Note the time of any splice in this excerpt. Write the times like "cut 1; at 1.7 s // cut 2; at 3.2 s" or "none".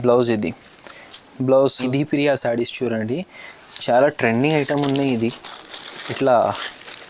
cut 1; at 1.8 s